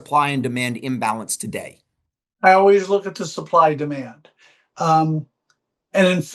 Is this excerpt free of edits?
yes; 0 cuts

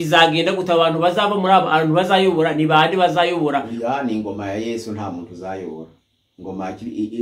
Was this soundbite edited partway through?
no; 0 cuts

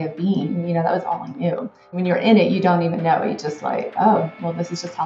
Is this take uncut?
no; 1 cut; at 2.0 s

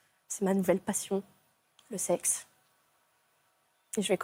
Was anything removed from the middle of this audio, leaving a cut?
no; 0 cuts

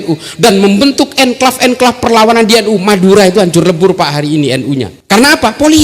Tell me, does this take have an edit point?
yes; 1 cut; at 4.9 s

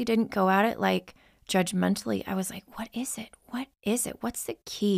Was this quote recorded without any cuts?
yes; 0 cuts

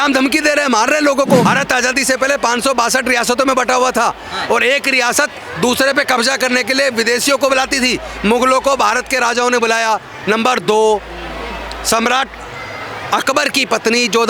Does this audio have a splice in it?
yes; 1 cut; at 1.5 s

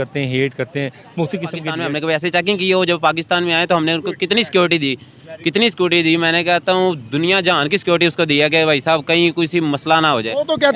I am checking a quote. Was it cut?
yes; 1 cut; at 1.8 s

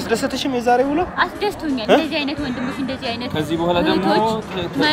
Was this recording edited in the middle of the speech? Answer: yes; 1 cut; at 1.8 s

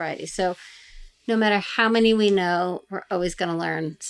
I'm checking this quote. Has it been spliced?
no; 0 cuts

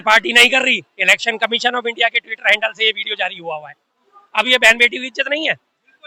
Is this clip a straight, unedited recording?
yes; 0 cuts

